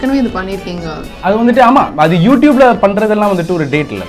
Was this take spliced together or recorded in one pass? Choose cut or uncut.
cut